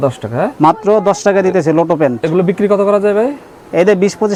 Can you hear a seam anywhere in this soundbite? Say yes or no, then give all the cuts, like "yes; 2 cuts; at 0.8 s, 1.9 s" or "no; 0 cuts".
no; 0 cuts